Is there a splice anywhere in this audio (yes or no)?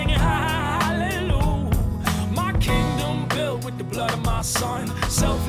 no